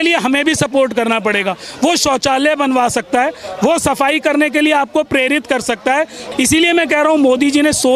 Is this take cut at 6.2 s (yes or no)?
yes